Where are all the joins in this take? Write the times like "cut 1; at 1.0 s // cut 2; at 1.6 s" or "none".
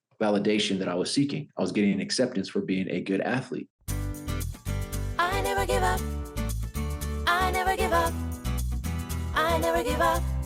cut 1; at 3.8 s